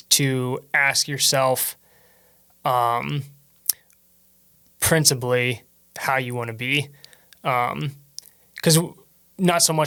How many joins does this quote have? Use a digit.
0